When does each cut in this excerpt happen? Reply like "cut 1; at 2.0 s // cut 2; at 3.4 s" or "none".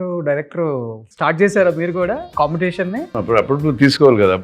cut 1; at 1.0 s // cut 2; at 2.3 s // cut 3; at 3.1 s